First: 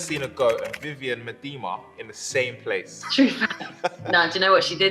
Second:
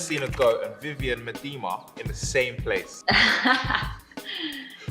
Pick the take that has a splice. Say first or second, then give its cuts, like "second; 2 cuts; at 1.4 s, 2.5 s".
first; 2 cuts; at 2.9 s, 4.0 s